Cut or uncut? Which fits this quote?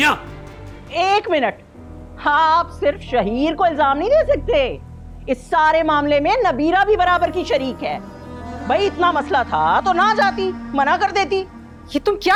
uncut